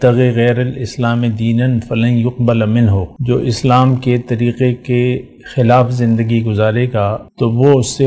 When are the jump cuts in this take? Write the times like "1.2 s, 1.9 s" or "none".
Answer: 3.1 s, 7.3 s